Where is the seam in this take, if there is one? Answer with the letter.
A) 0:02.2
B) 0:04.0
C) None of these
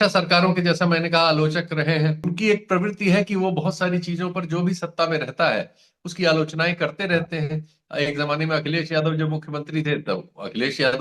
A